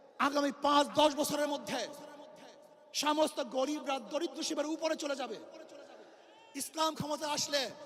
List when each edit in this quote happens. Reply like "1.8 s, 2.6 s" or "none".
none